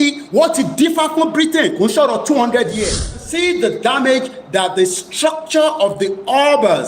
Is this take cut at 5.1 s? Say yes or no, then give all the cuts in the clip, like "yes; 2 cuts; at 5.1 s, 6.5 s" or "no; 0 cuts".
no; 1 cut; at 3.3 s